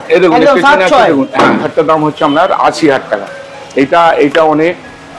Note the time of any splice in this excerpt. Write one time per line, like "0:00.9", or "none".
0:01.6